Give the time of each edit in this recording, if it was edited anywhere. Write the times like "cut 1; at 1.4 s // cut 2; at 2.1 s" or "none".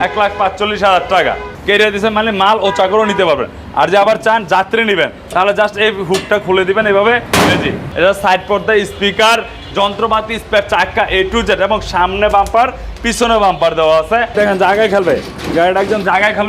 cut 1; at 1.5 s // cut 2; at 7.8 s // cut 3; at 14.3 s